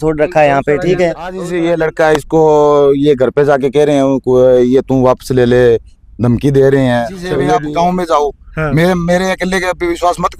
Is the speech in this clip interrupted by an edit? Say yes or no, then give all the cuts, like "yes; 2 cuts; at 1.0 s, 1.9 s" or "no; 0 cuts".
yes; 2 cuts; at 1.5 s, 7.3 s